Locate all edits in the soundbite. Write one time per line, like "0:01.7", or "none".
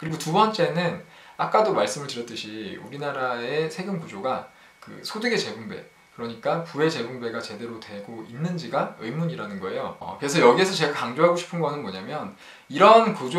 0:10.1